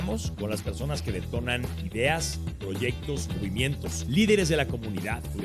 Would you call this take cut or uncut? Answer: uncut